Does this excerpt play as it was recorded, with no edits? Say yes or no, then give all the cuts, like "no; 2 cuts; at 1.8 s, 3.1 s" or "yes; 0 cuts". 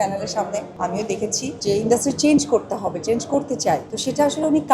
no; 2 cuts; at 0.9 s, 3.9 s